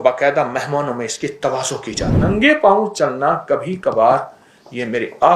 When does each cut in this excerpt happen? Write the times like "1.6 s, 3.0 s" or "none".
2.2 s

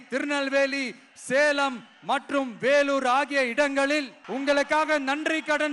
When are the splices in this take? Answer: 4.2 s

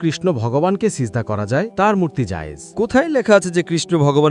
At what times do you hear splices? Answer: none

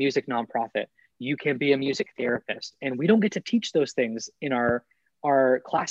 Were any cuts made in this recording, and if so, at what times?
none

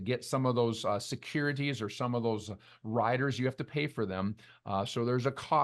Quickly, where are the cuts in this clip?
none

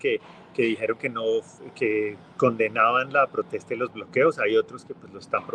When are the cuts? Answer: none

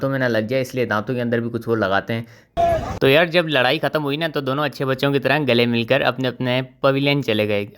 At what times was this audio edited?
2.5 s

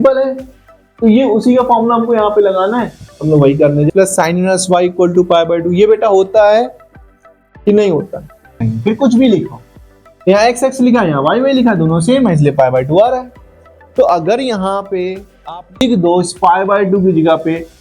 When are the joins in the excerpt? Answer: 3.9 s, 8.6 s

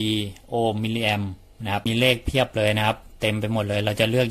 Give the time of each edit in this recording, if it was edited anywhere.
1.9 s

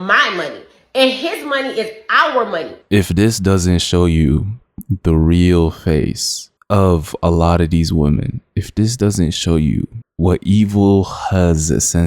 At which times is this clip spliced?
none

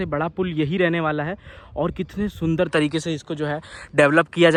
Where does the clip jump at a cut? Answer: none

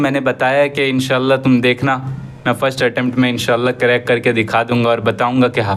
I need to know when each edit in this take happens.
none

